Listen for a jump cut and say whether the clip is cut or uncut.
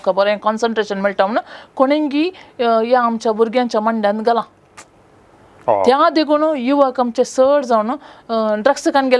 uncut